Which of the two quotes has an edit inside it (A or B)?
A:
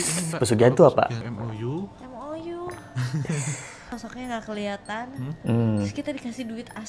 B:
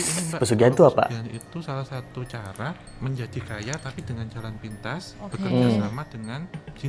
A